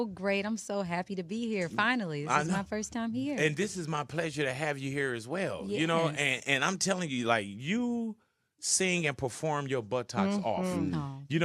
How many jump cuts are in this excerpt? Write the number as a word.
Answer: one